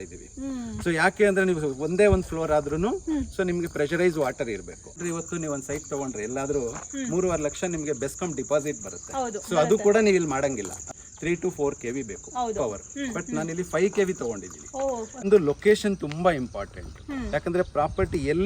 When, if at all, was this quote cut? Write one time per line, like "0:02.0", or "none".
0:05.0
0:10.9
0:15.2